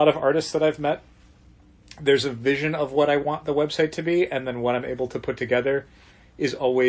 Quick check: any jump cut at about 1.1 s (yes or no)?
no